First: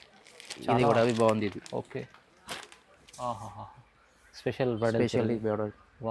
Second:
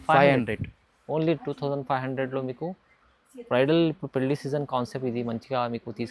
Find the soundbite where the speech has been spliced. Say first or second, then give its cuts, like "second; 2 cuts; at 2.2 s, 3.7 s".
first; 1 cut; at 3.1 s